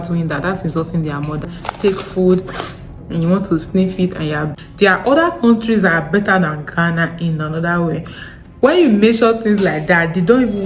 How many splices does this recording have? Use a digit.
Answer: 2